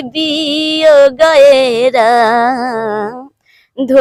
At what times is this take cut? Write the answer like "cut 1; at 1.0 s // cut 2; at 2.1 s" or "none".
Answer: none